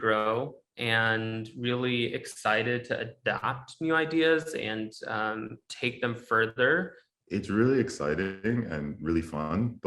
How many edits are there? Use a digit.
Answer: 1